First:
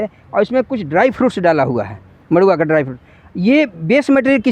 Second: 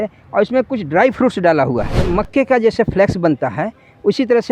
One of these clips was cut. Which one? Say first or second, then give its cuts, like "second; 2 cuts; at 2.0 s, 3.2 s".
second; 1 cut; at 2.0 s